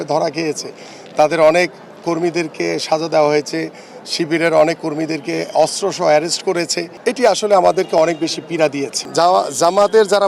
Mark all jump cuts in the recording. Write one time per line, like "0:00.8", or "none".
0:06.8
0:09.0